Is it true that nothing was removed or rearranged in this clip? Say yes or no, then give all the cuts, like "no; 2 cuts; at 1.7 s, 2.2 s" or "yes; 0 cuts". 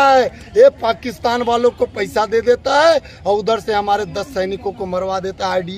yes; 0 cuts